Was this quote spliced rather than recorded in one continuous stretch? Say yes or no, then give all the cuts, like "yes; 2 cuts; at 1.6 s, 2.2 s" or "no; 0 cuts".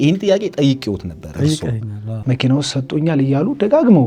yes; 1 cut; at 2.2 s